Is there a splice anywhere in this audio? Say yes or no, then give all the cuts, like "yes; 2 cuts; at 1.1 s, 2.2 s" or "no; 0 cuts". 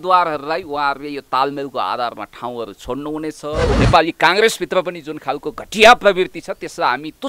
yes; 1 cut; at 3.8 s